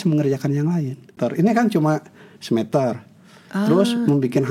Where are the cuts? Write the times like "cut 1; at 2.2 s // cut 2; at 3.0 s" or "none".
cut 1; at 1.1 s